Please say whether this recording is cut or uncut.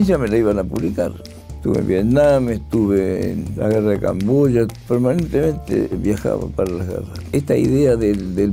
cut